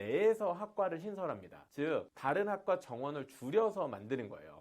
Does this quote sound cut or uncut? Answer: cut